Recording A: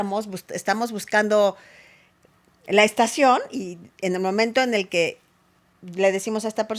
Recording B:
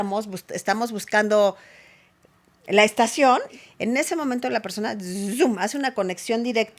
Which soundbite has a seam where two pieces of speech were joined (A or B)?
B